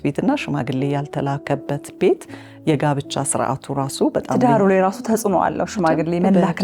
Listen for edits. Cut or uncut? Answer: uncut